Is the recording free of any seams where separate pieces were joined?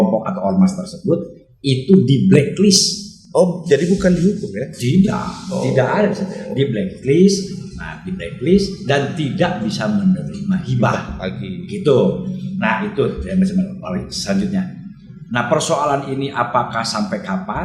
yes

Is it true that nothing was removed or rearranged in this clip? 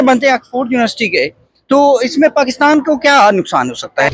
yes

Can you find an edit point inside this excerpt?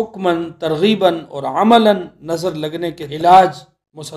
yes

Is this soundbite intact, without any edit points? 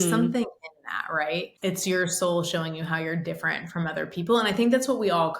no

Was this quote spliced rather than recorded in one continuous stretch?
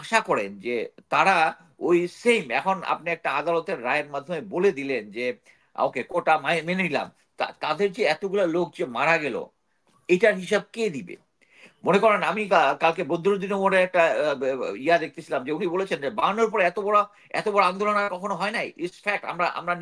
no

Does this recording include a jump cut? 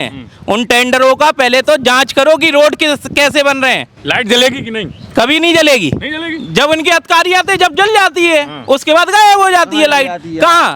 no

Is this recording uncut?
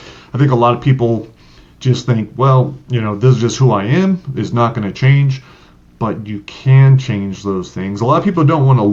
yes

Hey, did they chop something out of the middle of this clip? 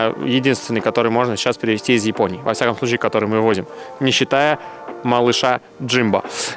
no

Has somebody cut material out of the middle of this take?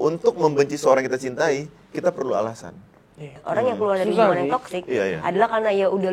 yes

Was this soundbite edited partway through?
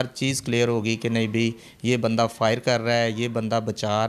no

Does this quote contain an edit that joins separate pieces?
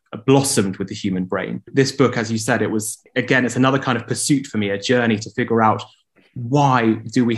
yes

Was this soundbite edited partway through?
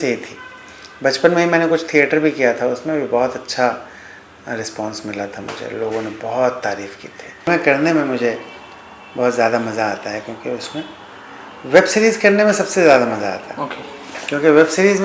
yes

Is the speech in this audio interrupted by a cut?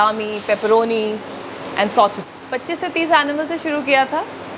yes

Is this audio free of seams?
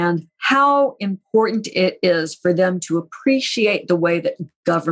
yes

